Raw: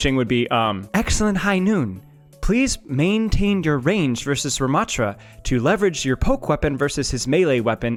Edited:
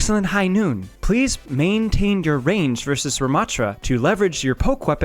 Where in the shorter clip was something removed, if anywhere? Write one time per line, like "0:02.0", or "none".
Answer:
0:00.9
0:03.8